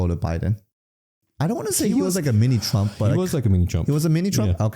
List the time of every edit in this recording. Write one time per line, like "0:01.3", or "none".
0:01.0